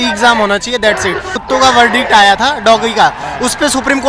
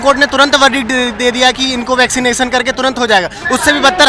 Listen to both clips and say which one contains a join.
first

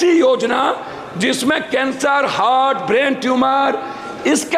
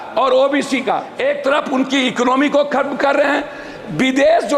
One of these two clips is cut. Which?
second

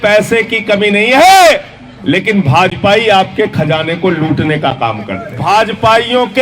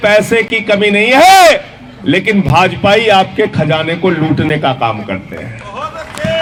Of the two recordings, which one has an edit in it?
first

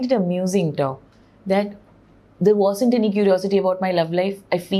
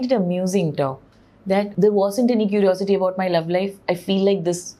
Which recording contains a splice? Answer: second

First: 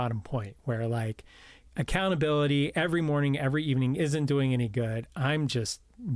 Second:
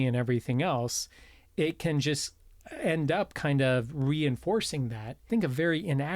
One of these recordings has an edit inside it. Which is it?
second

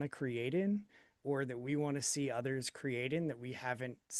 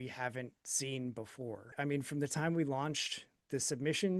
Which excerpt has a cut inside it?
second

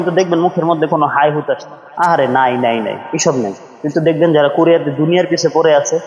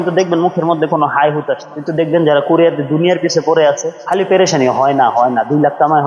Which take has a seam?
second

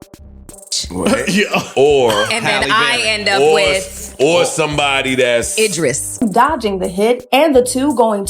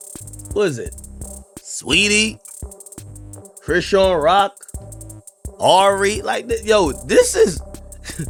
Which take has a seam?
first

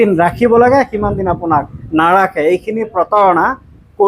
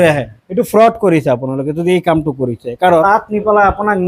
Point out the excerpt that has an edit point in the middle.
second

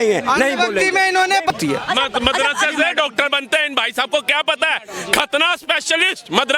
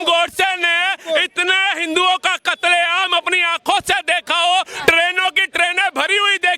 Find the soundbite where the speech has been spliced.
first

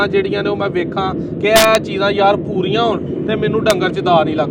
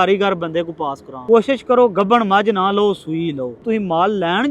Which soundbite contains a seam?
second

